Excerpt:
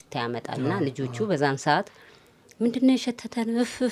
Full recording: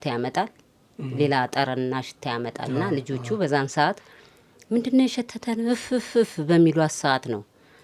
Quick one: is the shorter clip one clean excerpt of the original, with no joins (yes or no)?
yes